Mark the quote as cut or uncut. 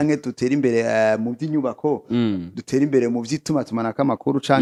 uncut